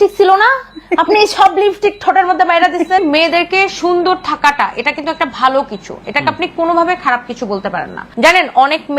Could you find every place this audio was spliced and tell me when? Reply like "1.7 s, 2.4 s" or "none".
3.0 s, 8.0 s

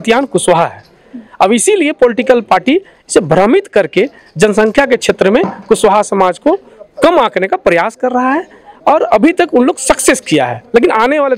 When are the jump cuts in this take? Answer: none

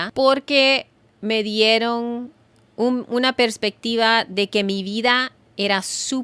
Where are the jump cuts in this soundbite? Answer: none

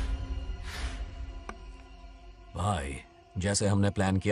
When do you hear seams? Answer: none

